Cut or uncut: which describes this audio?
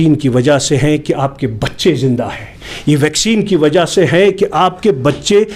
uncut